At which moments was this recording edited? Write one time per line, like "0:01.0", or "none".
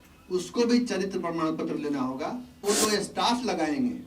0:02.6

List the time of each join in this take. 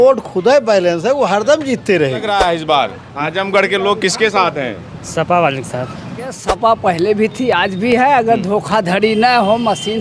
0:02.3
0:06.4

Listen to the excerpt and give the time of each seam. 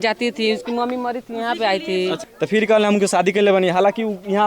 0:02.2

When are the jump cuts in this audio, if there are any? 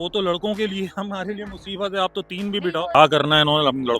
0:02.9

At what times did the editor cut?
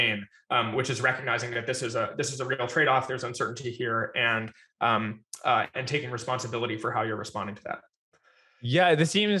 none

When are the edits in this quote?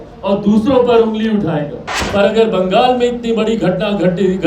0:02.0

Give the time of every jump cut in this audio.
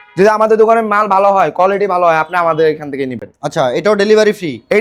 none

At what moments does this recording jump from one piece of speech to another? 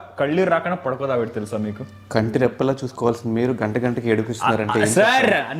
none

